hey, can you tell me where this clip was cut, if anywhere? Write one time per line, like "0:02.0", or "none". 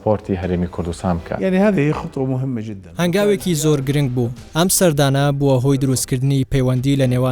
0:01.3
0:02.8
0:04.4